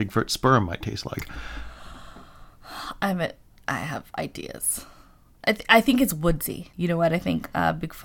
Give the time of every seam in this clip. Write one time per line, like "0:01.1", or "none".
0:06.7